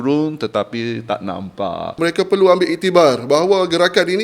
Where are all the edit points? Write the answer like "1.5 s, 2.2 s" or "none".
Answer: 2.0 s